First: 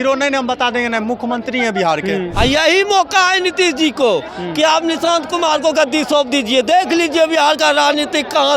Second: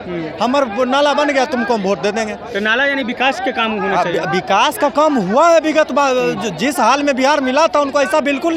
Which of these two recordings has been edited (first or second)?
first